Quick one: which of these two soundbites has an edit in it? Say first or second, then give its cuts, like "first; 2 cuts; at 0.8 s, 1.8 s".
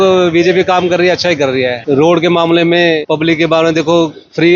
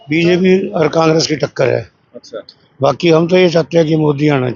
first; 2 cuts; at 1.8 s, 3.0 s